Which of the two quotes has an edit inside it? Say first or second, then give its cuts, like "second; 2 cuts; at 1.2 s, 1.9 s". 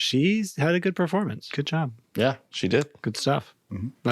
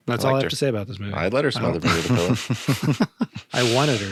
first; 1 cut; at 1.4 s